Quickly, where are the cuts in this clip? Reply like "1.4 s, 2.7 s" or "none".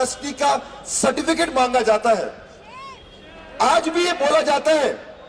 none